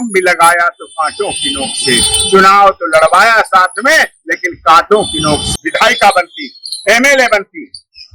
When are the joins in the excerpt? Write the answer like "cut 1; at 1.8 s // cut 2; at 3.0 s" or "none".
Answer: cut 1; at 5.5 s